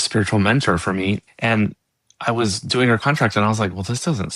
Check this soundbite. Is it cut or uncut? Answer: cut